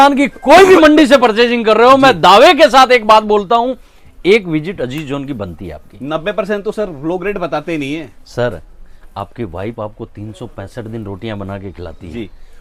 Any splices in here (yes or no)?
no